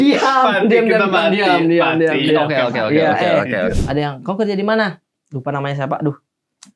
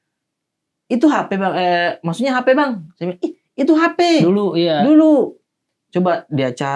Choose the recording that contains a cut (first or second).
first